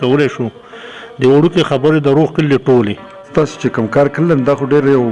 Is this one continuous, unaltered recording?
no; 1 cut; at 3.3 s

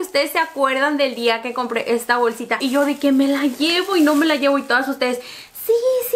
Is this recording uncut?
no; 1 cut; at 2.6 s

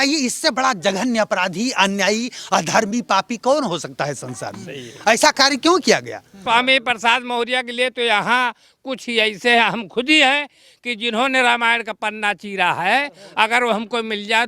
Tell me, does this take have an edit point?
yes; 1 cut; at 6.4 s

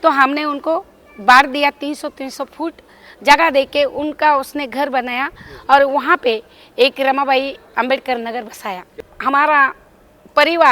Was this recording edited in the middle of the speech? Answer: yes; 1 cut; at 8.8 s

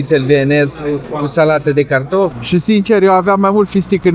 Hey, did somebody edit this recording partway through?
yes; 1 cut; at 2.4 s

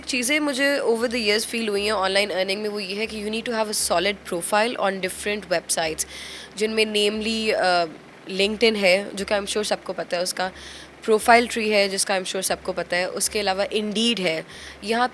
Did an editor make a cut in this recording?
no; 0 cuts

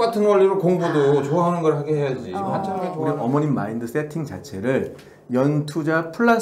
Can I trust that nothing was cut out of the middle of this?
no; 1 cut; at 2.6 s

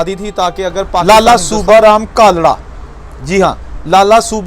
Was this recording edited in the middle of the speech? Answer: yes; 1 cut; at 1.0 s

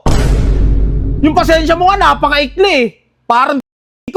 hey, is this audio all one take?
yes; 0 cuts

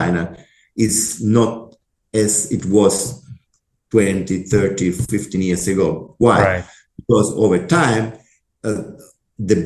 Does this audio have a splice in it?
no; 0 cuts

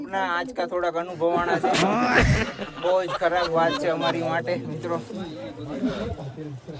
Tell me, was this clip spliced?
no; 0 cuts

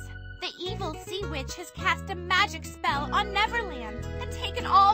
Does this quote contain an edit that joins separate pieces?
no; 0 cuts

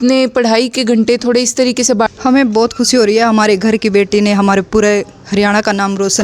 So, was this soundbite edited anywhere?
yes; 1 cut; at 2.1 s

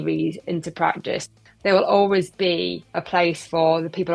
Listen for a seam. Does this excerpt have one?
yes; 1 cut; at 1.3 s

